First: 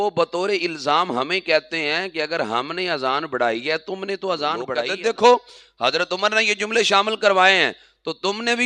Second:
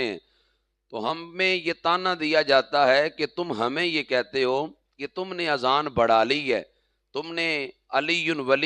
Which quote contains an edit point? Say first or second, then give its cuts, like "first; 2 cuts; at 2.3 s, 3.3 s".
first; 1 cut; at 4.8 s